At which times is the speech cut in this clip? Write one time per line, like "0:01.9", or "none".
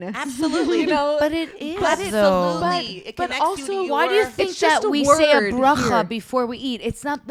none